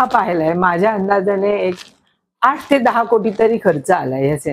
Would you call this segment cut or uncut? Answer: uncut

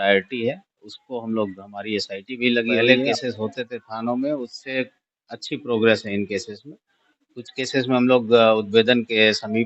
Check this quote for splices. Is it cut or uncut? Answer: cut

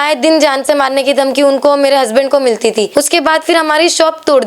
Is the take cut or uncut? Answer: cut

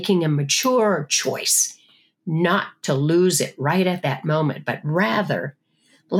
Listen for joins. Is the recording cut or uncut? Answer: uncut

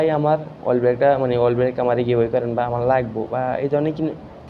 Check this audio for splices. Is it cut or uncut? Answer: uncut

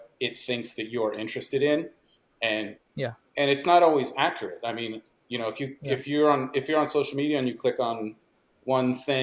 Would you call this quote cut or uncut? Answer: uncut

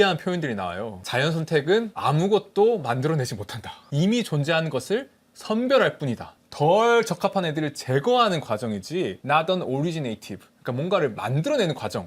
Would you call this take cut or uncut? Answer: cut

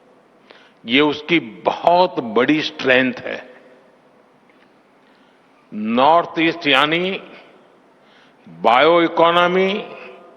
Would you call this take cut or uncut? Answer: cut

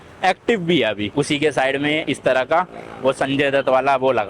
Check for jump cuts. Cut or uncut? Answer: cut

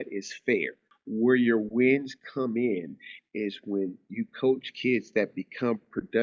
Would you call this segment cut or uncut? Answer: cut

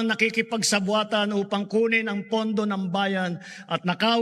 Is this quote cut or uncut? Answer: uncut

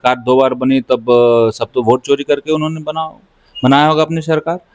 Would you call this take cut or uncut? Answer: uncut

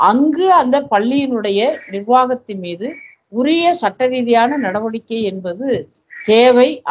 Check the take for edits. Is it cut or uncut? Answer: uncut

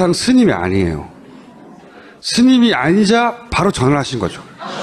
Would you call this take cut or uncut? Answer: uncut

